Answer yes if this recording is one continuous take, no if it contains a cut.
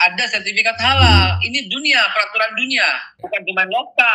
no